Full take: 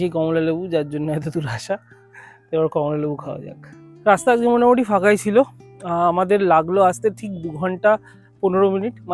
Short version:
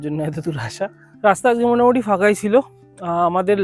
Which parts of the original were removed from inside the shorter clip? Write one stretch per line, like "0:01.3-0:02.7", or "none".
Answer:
0:01.9-0:03.9

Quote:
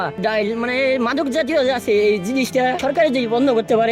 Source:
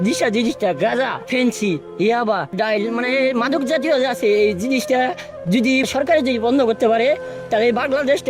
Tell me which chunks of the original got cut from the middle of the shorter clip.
0:05.1-0:05.9

